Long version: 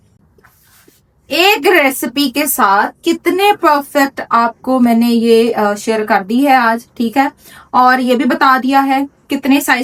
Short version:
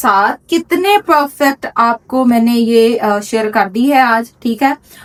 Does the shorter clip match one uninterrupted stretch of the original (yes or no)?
yes